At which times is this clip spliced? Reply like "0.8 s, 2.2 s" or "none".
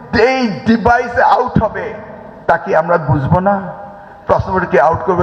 none